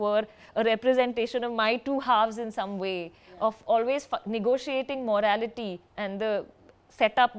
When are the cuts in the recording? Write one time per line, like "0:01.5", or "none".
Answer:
none